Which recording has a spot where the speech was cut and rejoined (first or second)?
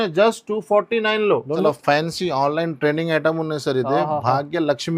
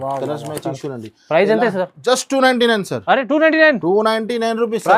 first